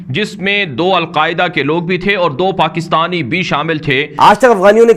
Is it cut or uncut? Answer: cut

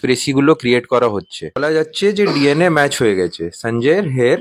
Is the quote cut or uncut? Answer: cut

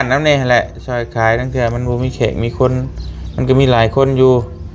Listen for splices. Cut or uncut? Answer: uncut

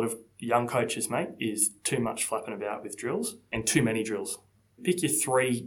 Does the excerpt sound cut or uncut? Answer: cut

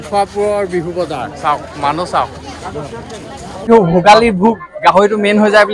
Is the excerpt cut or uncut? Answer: cut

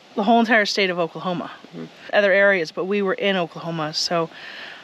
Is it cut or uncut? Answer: cut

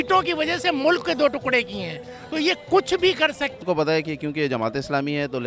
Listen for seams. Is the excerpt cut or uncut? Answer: cut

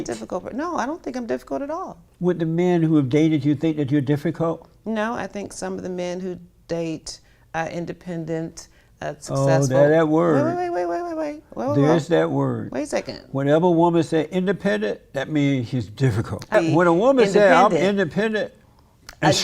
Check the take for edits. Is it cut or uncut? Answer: cut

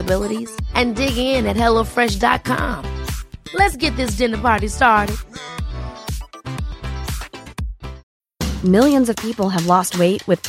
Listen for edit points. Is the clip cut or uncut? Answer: cut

